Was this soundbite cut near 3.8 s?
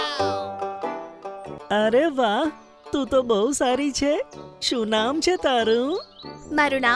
no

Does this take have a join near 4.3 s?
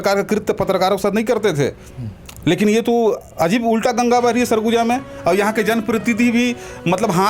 no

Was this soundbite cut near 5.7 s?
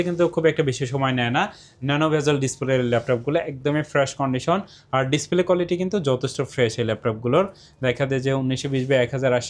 no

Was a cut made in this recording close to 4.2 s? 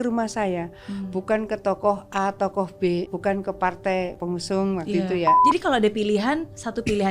yes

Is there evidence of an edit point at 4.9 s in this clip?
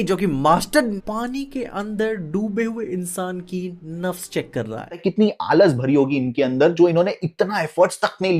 yes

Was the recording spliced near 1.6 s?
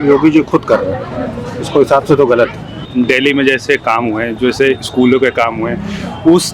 no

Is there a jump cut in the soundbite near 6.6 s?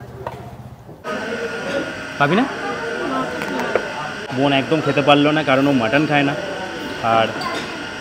no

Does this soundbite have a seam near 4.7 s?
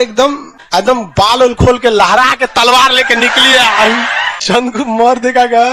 yes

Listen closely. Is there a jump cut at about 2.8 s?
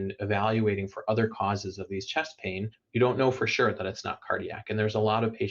yes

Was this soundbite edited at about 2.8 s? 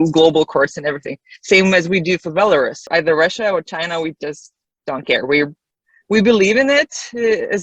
yes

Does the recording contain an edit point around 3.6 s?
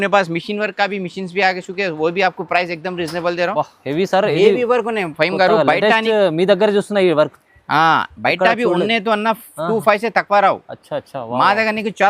yes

